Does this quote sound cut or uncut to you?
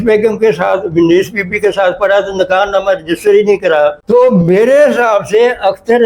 cut